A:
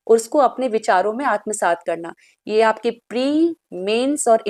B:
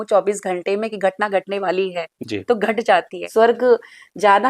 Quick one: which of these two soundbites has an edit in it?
B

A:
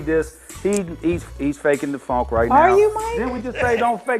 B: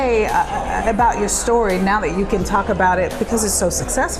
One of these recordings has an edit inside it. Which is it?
A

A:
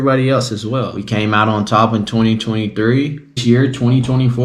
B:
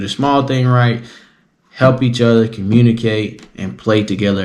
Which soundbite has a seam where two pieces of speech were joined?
A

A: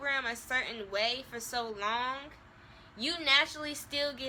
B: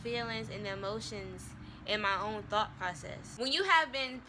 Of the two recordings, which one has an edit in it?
B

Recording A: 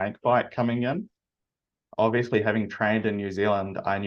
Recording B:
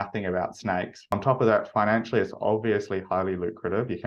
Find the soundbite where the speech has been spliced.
B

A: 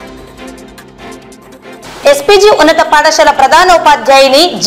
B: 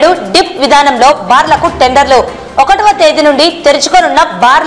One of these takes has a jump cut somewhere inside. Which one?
A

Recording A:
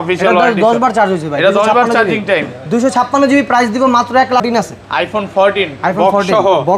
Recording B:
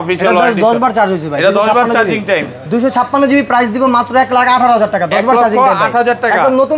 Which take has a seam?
A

